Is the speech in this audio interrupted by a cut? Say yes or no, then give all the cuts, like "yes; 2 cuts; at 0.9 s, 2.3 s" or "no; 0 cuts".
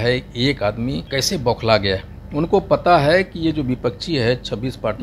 yes; 1 cut; at 1.0 s